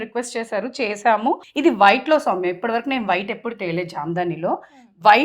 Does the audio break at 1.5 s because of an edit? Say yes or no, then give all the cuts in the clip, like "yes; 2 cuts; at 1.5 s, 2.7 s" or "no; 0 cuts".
yes; 1 cut; at 1.5 s